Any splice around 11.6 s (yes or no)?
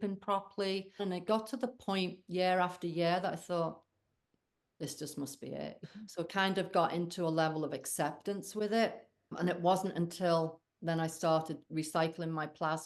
no